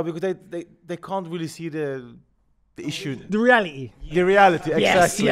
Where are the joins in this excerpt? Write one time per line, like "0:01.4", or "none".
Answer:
0:03.1